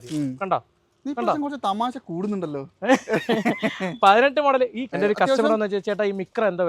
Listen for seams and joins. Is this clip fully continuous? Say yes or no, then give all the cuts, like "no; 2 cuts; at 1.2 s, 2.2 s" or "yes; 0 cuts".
no; 1 cut; at 4.9 s